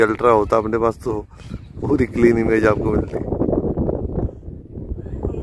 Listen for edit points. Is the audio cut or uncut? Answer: uncut